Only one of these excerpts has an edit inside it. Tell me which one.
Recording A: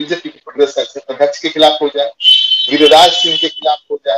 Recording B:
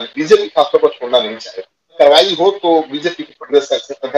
B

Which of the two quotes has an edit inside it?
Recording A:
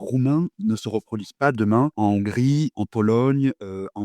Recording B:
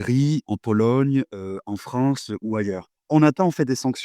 B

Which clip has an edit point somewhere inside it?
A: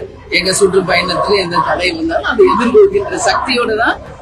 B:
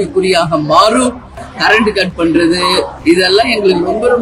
B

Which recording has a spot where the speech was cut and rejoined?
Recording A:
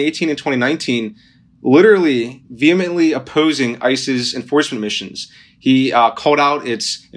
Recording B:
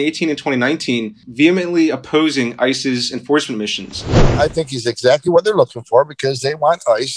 B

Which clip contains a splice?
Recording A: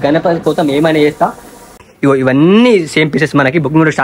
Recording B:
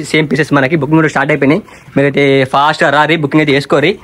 A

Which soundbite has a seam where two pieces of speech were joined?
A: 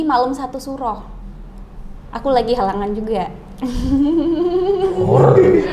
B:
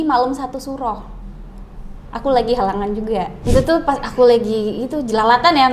B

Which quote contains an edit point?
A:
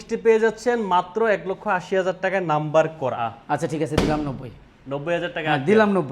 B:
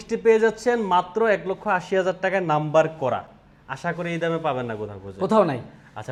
A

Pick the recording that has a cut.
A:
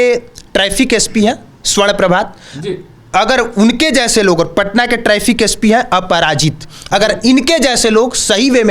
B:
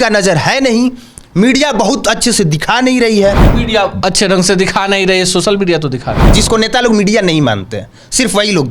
B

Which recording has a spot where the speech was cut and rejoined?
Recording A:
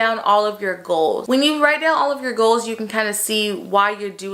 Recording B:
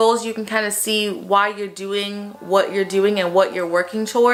A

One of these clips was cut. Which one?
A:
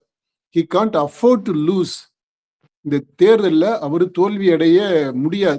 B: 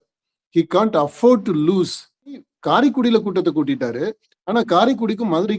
B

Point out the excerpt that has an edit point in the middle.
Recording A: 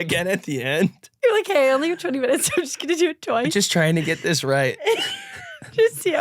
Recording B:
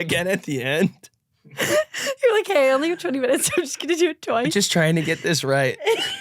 A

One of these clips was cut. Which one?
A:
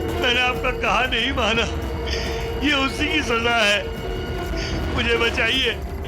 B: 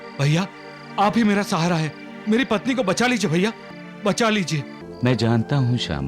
B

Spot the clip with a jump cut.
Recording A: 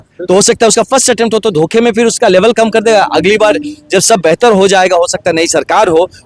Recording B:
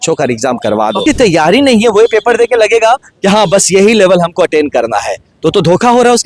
B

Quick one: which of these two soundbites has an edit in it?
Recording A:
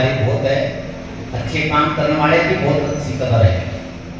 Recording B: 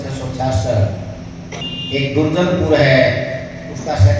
B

